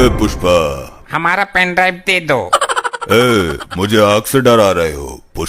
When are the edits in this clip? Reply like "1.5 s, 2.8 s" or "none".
1.0 s